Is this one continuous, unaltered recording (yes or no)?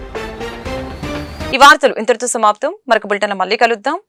yes